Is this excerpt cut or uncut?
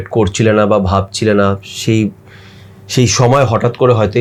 uncut